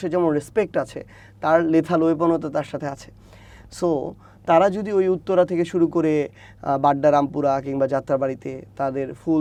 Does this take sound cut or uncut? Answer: uncut